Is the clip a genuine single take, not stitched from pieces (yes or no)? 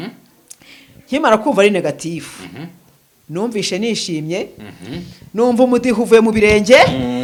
yes